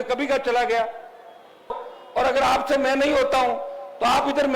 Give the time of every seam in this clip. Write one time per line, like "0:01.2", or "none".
0:01.9